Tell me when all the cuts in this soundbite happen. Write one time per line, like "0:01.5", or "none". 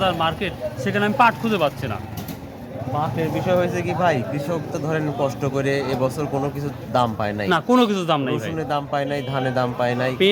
none